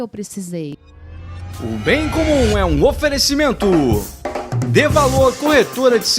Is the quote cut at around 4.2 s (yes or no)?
no